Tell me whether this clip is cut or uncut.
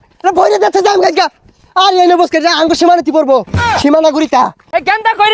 uncut